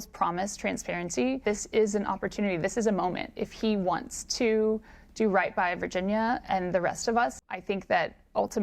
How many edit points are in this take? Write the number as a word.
two